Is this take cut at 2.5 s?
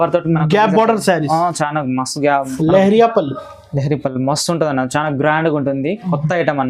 yes; 1 cut; at 2.5 s

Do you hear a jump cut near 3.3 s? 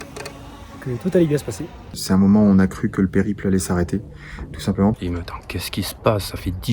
no; 2 cuts; at 2.0 s, 5.0 s

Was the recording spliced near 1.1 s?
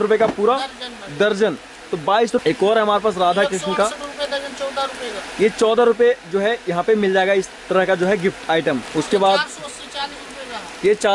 no; 2 cuts; at 2.4 s, 8.9 s

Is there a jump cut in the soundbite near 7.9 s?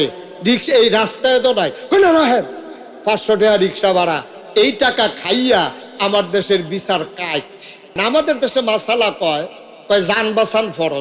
yes; 1 cut; at 7.9 s

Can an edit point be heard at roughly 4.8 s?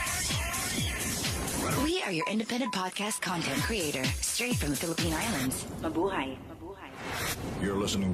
yes; 1 cut; at 4.8 s

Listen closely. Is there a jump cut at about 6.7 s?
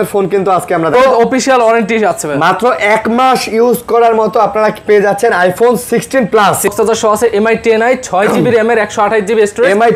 yes; 2 cuts; at 0.9 s, 6.7 s

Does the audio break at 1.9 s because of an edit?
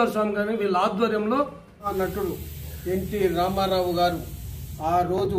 yes; 1 cut; at 1.9 s

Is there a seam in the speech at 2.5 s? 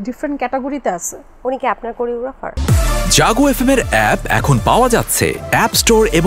yes; 1 cut; at 2.5 s

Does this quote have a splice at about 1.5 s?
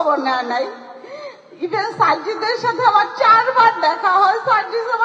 no; 0 cuts

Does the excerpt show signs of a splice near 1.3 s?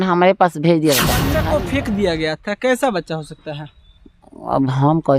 yes; 1 cut; at 1.3 s

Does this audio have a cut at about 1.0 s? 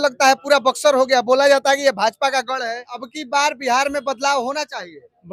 no; 1 cut; at 3.1 s

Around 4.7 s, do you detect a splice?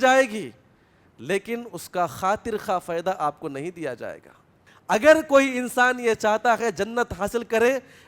yes; 1 cut; at 4.7 s

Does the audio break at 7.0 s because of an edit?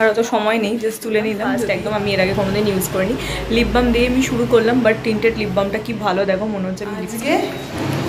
yes; 2 cuts; at 1.6 s, 7.0 s

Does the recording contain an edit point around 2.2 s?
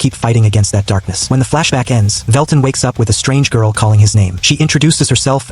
yes; 3 cuts; at 1.1 s, 2.2 s, 4.3 s

